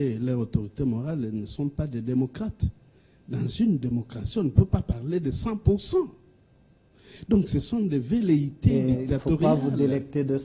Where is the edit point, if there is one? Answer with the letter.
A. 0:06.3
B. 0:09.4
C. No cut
B